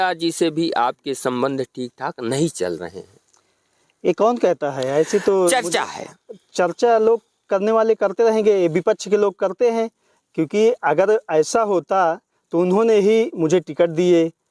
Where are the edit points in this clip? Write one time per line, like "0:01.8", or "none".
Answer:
none